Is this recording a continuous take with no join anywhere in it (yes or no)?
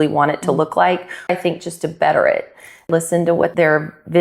no